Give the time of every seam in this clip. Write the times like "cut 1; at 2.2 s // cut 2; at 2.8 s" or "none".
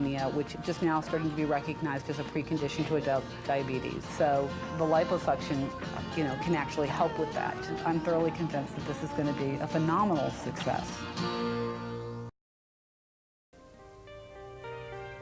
cut 1; at 7.7 s